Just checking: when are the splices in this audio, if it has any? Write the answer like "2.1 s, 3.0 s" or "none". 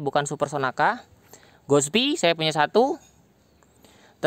none